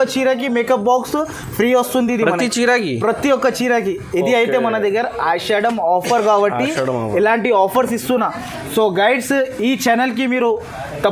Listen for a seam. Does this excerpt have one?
no; 0 cuts

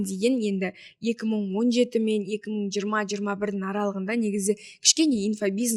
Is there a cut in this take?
no; 0 cuts

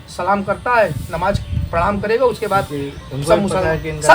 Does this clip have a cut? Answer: no; 0 cuts

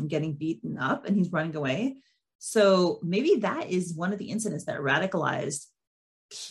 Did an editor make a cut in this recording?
no; 0 cuts

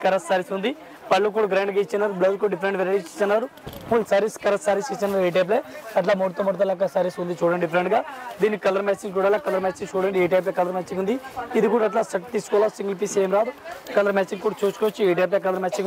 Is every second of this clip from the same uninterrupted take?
yes; 0 cuts

